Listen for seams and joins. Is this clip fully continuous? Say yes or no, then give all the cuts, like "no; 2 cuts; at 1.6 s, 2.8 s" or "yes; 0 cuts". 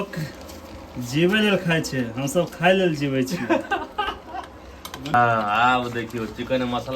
no; 1 cut; at 5.1 s